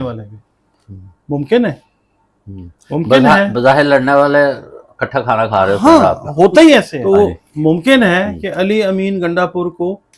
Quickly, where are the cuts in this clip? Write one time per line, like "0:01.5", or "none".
0:06.9

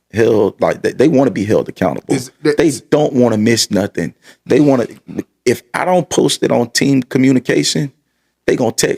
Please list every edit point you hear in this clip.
none

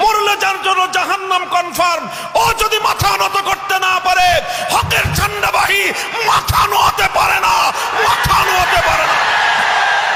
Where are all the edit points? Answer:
none

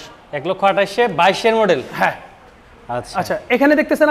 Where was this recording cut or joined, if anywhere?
none

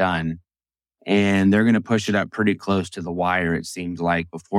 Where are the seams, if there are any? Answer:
none

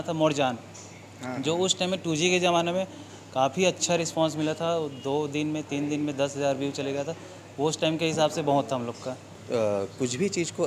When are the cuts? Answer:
0:09.4

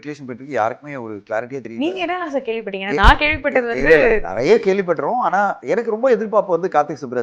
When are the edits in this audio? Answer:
0:05.6

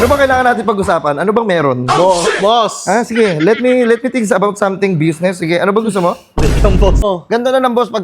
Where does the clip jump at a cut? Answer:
0:07.0

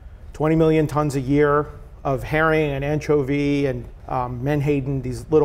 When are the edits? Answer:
0:03.9

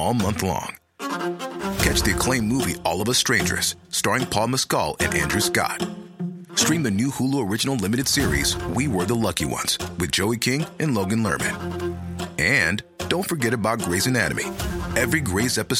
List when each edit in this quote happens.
none

